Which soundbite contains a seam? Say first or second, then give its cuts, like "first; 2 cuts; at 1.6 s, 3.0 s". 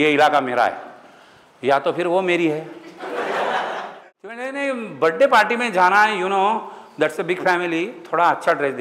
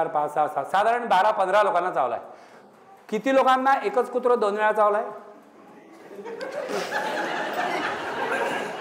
first; 1 cut; at 3.9 s